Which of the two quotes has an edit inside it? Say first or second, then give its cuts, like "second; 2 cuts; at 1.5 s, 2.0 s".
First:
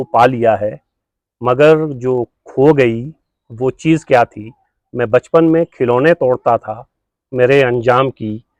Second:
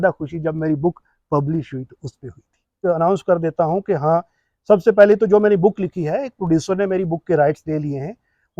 second; 1 cut; at 2.8 s